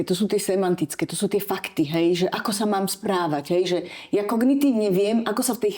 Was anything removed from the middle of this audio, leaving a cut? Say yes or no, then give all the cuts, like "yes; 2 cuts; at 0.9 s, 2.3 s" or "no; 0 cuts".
no; 0 cuts